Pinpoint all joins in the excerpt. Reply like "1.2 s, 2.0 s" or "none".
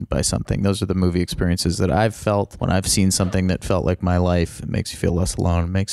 2.5 s